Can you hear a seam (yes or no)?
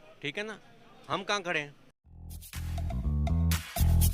no